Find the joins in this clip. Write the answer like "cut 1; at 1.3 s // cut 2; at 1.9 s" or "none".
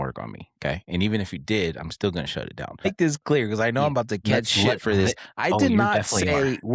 cut 1; at 2.8 s